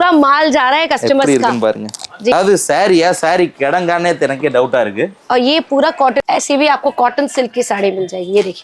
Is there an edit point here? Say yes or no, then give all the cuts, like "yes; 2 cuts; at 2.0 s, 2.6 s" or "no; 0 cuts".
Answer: yes; 2 cuts; at 2.3 s, 6.2 s